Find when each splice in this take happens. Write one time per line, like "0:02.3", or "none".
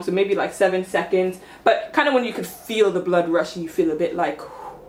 none